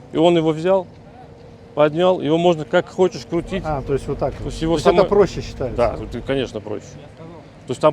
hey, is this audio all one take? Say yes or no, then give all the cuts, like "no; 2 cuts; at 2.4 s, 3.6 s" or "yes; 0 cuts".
yes; 0 cuts